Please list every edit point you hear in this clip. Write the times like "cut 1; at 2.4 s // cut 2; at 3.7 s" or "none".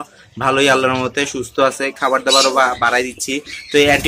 none

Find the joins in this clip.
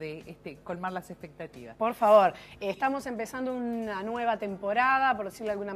cut 1; at 4.2 s

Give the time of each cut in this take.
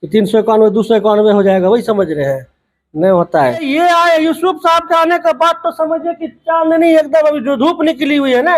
cut 1; at 3.6 s

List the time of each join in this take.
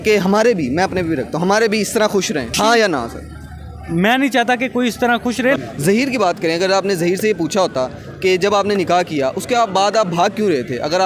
cut 1; at 2.6 s // cut 2; at 5.6 s

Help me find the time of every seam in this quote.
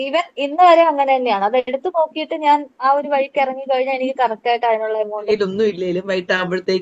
cut 1; at 5.3 s

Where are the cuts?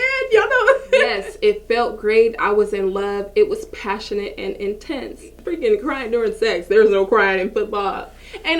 cut 1; at 1.2 s // cut 2; at 5.4 s

